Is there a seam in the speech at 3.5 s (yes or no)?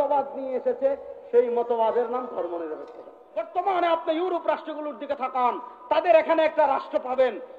yes